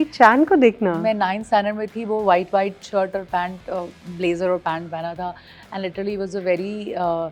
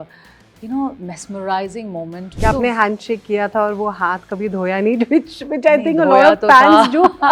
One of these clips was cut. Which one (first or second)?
second